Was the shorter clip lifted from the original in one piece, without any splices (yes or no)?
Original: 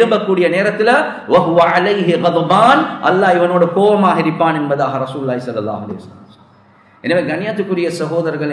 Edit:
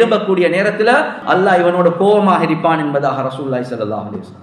no